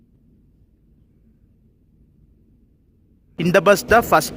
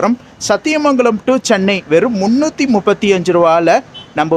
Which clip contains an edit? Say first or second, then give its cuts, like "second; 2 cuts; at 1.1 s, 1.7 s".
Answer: first; 1 cut; at 3.3 s